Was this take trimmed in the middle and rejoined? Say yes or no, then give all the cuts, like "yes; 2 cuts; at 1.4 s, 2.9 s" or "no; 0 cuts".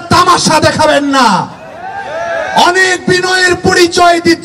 no; 0 cuts